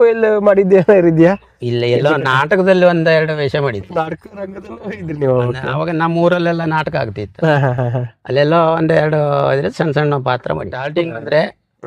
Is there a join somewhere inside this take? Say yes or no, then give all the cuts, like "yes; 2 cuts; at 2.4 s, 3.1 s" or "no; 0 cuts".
yes; 1 cut; at 10.7 s